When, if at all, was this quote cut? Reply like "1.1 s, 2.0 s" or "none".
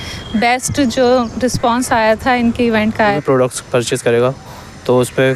2.9 s